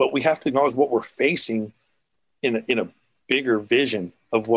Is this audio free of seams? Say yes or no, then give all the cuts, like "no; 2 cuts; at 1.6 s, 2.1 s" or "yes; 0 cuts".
yes; 0 cuts